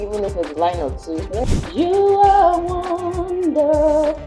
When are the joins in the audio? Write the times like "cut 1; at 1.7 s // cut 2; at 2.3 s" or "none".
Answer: cut 1; at 1.4 s